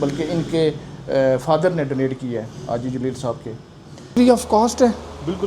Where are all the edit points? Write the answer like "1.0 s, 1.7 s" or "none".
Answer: 4.1 s